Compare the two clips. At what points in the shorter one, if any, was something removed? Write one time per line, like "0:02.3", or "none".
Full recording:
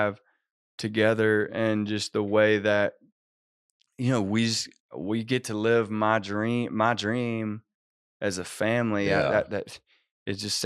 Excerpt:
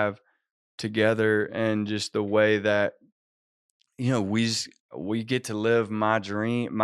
none